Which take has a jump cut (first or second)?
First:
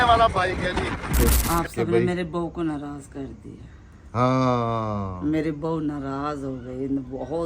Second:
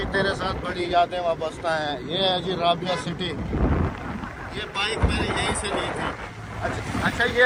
first